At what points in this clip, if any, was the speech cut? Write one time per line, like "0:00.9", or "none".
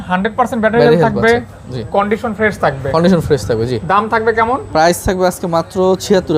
none